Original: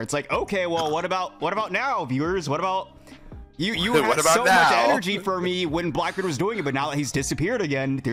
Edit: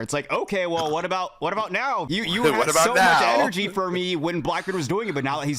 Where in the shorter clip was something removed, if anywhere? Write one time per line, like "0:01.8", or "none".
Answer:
0:02.1